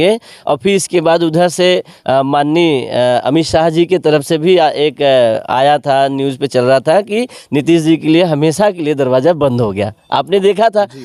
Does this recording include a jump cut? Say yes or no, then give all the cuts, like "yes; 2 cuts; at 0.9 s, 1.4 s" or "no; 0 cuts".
no; 0 cuts